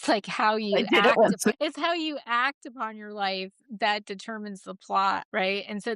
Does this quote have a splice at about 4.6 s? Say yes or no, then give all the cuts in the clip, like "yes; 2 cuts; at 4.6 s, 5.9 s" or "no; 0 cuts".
no; 1 cut; at 1.5 s